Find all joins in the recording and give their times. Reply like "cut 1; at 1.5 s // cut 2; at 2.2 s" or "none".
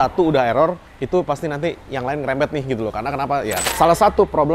cut 1; at 3.6 s

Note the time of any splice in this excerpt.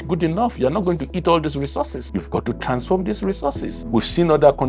cut 1; at 2.1 s // cut 2; at 3.7 s

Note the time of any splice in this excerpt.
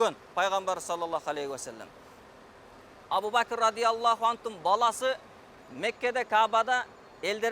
none

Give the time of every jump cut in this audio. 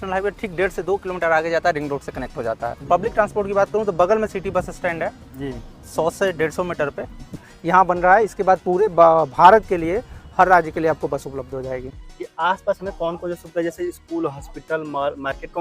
cut 1; at 2.7 s // cut 2; at 7.4 s // cut 3; at 12.0 s

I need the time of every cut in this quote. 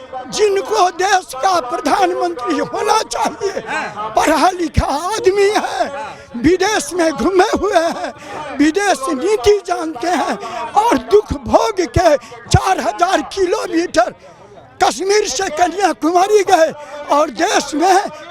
none

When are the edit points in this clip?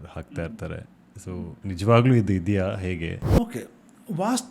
cut 1; at 1.5 s // cut 2; at 3.2 s

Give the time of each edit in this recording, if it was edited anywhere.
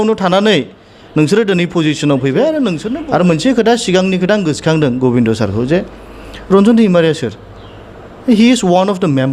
cut 1; at 2.9 s

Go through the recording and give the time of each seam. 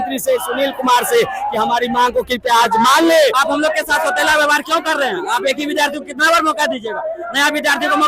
cut 1; at 3.3 s

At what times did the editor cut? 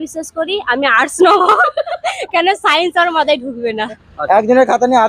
cut 1; at 4.0 s

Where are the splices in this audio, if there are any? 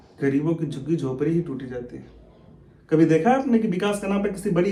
none

